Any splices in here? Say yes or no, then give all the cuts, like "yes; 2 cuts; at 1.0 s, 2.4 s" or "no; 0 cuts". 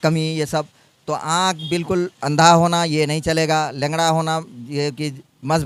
no; 0 cuts